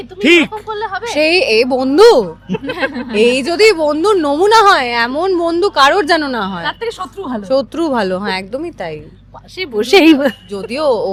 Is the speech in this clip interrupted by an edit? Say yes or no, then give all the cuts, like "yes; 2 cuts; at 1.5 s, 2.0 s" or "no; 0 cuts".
no; 0 cuts